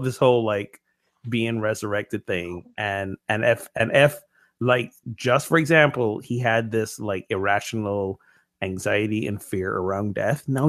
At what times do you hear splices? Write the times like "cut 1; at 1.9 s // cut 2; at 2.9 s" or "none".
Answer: none